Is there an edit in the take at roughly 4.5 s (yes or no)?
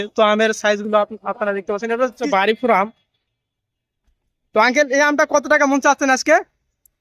no